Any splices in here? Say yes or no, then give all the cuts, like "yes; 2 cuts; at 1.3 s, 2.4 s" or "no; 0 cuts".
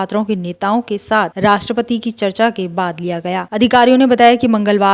yes; 1 cut; at 3.5 s